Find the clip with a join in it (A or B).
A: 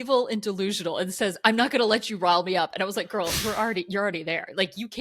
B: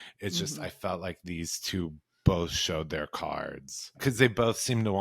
B